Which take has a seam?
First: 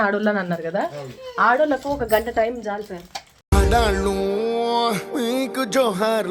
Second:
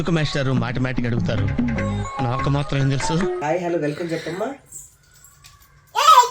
second; 1 cut; at 3.4 s

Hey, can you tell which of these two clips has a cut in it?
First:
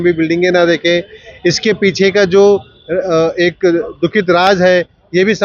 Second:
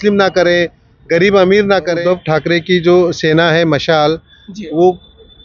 second; 1 cut; at 2.0 s

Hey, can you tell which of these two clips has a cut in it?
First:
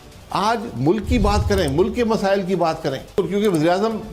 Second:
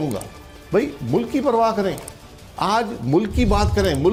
first; 1 cut; at 3.1 s

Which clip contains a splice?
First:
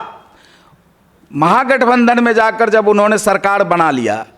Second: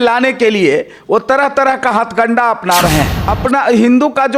second; 1 cut; at 3.2 s

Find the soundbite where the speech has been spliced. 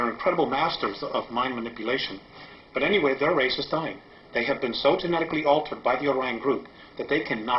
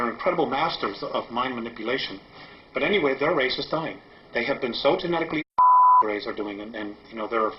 first; 1 cut; at 5.4 s

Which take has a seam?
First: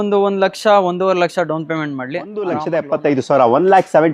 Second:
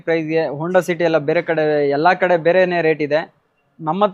first; 1 cut; at 2.5 s

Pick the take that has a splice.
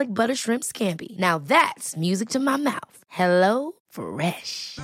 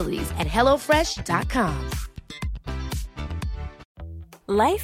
second; 1 cut; at 3.9 s

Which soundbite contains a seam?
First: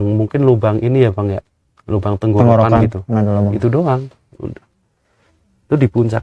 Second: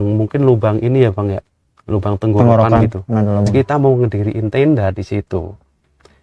second; 1 cut; at 3.5 s

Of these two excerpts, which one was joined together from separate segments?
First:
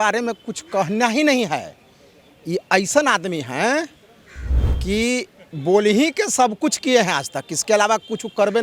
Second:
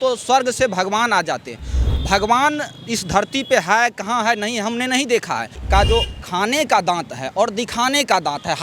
second; 1 cut; at 5.6 s

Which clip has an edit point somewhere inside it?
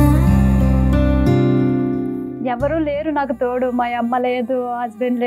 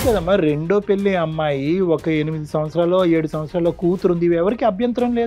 first; 1 cut; at 2.4 s

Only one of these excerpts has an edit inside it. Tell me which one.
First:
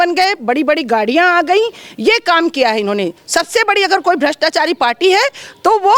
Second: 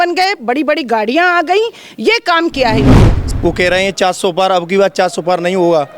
second; 1 cut; at 3.2 s

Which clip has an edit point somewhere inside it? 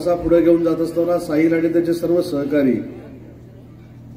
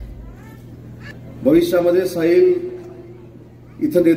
second; 1 cut; at 1.1 s

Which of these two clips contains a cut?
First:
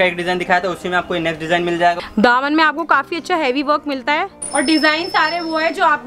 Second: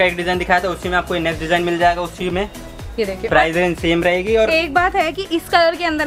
first; 2 cuts; at 2.0 s, 4.4 s

